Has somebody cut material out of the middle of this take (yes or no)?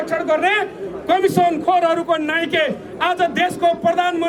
no